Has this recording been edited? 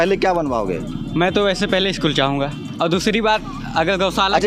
no; 0 cuts

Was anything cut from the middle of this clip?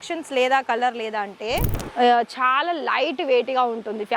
yes; 1 cut; at 1.8 s

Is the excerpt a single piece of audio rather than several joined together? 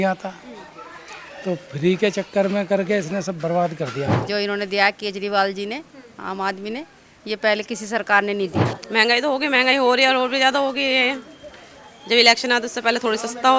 no; 2 cuts; at 4.2 s, 8.7 s

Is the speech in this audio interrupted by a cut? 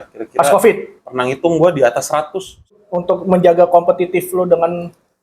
yes; 1 cut; at 2.7 s

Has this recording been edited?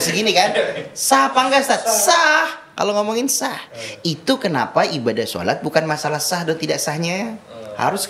no; 0 cuts

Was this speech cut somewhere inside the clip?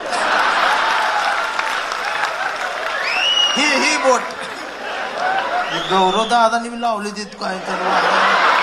no; 0 cuts

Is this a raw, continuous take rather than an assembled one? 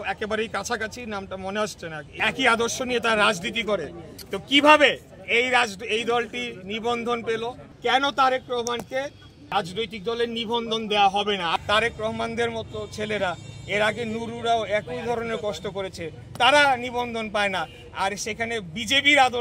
no; 4 cuts; at 2.1 s, 7.7 s, 9.5 s, 11.5 s

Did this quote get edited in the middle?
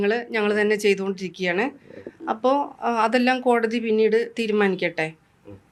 no; 0 cuts

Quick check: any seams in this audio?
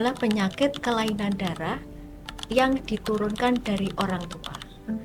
no; 0 cuts

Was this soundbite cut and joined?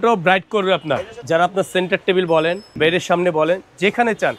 yes; 2 cuts; at 1.1 s, 2.7 s

